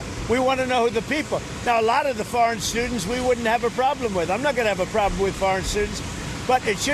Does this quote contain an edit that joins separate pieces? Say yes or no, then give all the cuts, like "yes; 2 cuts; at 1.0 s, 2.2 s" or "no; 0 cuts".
no; 0 cuts